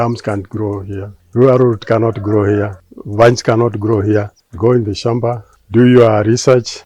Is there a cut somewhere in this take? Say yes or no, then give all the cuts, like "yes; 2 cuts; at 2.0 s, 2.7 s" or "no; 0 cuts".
no; 0 cuts